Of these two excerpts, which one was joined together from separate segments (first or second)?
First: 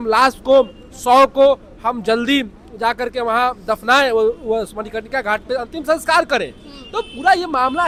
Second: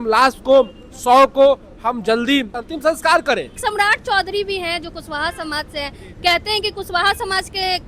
second